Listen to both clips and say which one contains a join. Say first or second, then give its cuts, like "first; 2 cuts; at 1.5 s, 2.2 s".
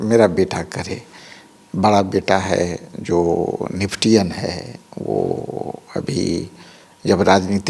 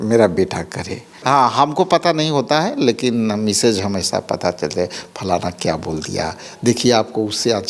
second; 1 cut; at 1.1 s